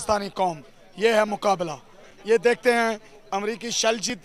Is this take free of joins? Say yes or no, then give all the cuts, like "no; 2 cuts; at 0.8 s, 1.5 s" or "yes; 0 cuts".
yes; 0 cuts